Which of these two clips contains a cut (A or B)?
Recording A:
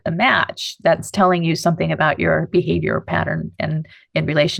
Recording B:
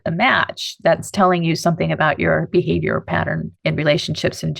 B